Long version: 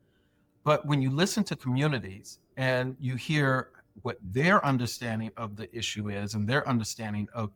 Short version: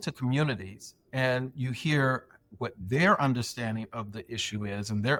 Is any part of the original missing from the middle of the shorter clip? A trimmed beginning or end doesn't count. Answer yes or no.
no